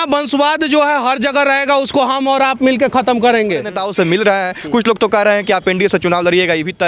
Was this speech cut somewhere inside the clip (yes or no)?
yes